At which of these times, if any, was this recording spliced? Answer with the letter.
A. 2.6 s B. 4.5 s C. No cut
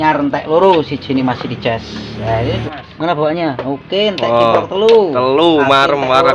A